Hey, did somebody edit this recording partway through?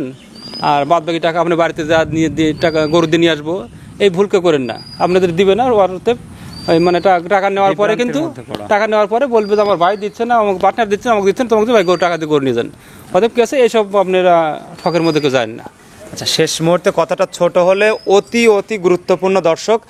no; 0 cuts

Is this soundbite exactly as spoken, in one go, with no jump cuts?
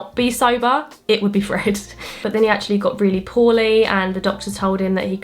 yes; 0 cuts

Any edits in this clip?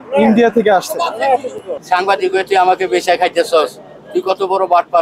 yes; 1 cut; at 1.6 s

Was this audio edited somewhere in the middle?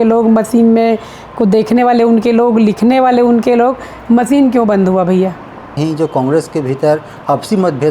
yes; 1 cut; at 5.8 s

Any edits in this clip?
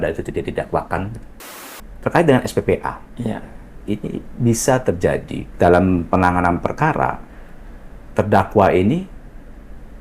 yes; 2 cuts; at 1.7 s, 5.4 s

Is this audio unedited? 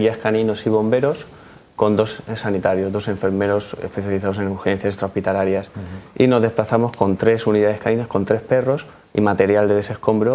no; 1 cut; at 8.3 s

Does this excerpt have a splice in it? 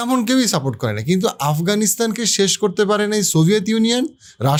no; 0 cuts

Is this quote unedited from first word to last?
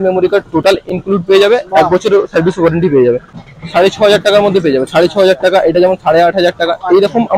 no; 1 cut; at 3.5 s

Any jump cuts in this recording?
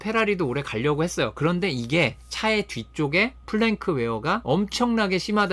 yes; 1 cut; at 4.4 s

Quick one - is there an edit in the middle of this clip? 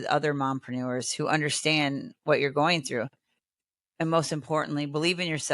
no; 0 cuts

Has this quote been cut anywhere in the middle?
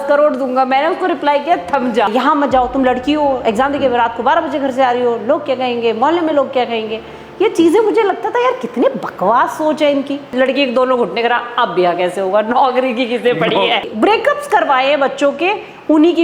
yes; 3 cuts; at 2.1 s, 10.3 s, 13.8 s

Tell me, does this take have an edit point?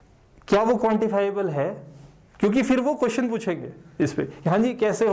no; 0 cuts

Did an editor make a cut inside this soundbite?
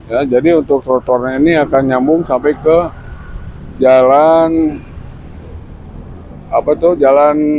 no; 0 cuts

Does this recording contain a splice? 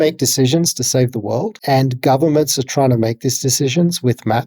yes; 1 cut; at 1.6 s

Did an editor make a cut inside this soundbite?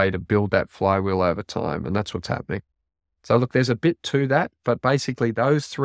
no; 0 cuts

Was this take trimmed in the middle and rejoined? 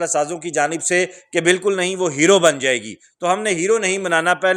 no; 0 cuts

